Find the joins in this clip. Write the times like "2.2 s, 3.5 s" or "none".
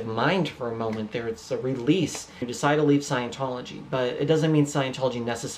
2.5 s